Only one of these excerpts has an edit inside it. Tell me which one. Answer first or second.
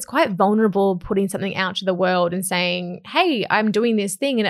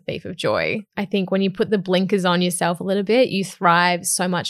second